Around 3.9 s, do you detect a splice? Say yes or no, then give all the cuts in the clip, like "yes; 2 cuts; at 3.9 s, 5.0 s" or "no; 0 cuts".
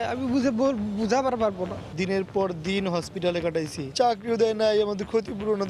yes; 2 cuts; at 1.8 s, 3.9 s